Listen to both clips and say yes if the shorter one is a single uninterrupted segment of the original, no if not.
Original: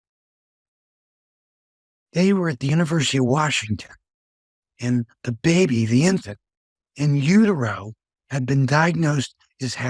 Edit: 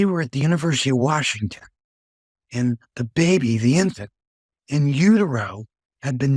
yes